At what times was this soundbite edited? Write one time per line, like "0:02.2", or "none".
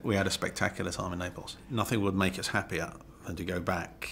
0:01.7